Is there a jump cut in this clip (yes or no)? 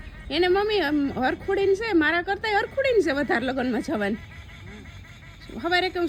no